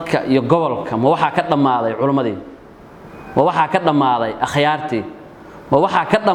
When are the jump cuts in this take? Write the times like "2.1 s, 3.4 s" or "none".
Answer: none